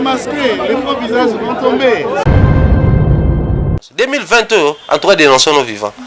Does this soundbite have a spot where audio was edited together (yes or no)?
yes